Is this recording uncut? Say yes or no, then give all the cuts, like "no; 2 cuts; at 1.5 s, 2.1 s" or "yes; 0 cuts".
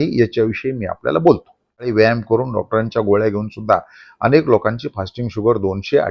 no; 1 cut; at 1.9 s